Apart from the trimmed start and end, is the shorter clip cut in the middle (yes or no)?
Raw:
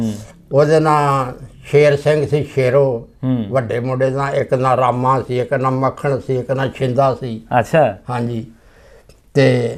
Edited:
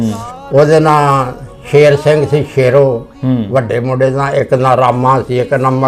no